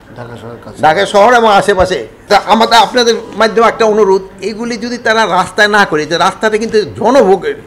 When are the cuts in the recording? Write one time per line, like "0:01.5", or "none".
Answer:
0:02.1